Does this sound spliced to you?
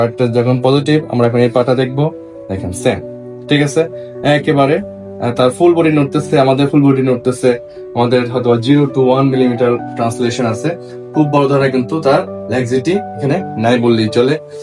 no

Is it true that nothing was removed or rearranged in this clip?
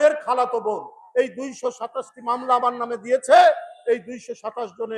no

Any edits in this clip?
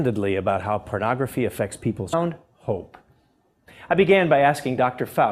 no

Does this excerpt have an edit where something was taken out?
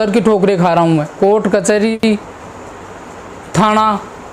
yes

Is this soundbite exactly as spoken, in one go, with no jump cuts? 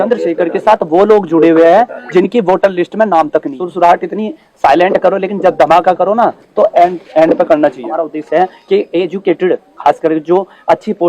no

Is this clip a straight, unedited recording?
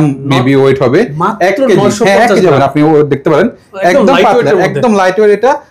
yes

